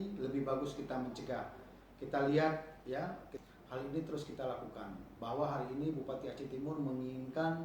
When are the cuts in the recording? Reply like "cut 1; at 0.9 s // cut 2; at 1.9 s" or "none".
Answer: cut 1; at 3.3 s